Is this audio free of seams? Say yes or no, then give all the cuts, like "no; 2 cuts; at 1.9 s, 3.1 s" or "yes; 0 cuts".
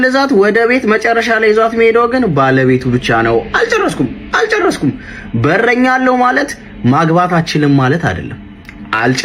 yes; 0 cuts